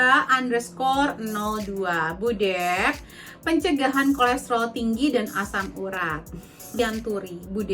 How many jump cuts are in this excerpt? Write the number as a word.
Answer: one